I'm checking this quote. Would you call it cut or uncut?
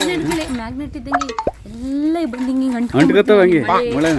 uncut